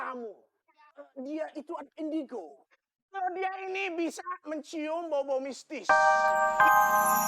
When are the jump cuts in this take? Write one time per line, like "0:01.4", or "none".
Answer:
0:05.7